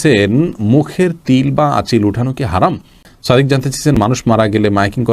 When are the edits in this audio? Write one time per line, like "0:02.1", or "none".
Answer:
0:03.0